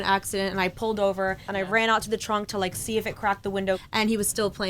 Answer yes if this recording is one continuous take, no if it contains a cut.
no